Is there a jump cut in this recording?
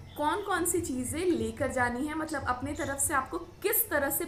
no; 0 cuts

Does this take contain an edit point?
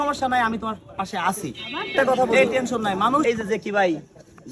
yes; 1 cut; at 3.2 s

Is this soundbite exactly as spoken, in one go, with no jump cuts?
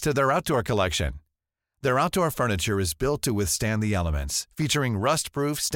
yes; 0 cuts

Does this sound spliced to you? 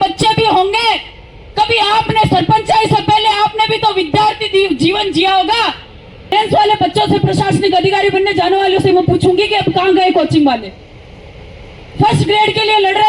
yes; 1 cut; at 6.3 s

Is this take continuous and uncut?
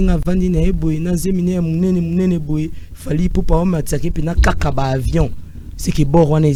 yes; 0 cuts

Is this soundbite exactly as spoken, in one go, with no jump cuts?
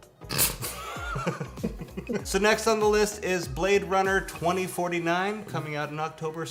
yes; 0 cuts

